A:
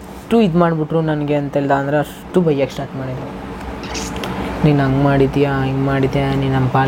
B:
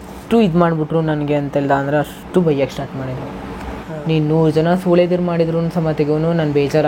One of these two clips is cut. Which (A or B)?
B